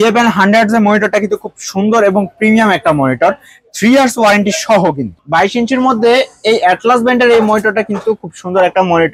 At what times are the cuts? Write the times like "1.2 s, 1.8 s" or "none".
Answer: 5.1 s